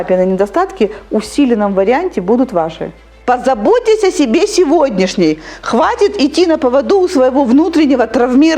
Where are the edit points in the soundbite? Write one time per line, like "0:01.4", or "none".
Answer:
0:03.1